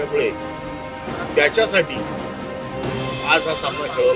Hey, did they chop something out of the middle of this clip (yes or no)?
no